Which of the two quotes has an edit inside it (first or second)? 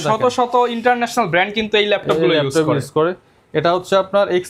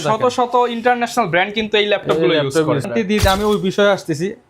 second